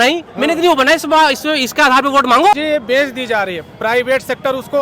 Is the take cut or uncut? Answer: cut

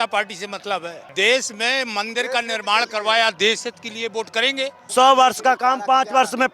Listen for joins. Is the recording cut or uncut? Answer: cut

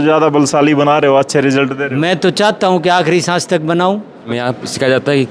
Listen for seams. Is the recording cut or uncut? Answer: cut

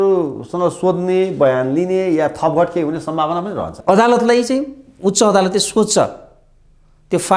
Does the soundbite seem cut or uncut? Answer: cut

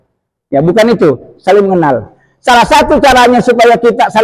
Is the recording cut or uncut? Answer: uncut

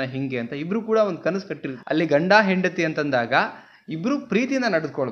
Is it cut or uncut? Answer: cut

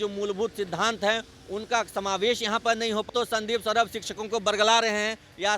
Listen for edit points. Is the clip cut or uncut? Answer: cut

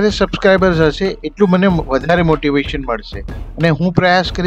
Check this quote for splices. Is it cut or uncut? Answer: uncut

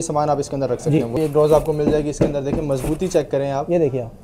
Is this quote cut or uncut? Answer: cut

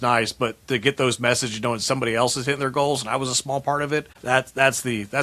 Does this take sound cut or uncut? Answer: cut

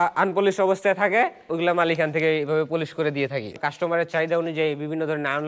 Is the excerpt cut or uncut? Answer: cut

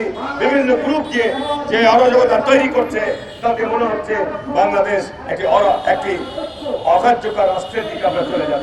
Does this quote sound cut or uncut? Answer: uncut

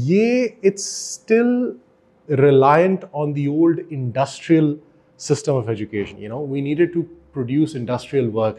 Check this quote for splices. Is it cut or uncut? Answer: cut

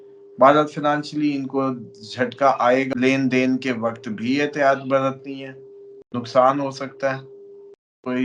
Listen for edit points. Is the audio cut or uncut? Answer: cut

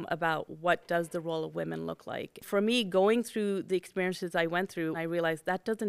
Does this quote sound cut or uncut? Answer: cut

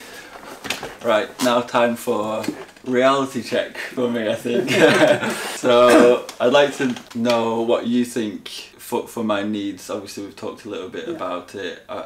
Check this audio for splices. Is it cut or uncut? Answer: uncut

